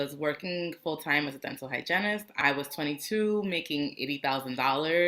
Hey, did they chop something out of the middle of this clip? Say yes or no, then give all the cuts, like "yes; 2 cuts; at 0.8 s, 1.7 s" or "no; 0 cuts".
yes; 1 cut; at 2.3 s